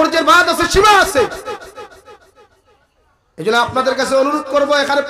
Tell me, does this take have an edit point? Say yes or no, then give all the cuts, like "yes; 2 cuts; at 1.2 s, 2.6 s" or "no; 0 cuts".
no; 0 cuts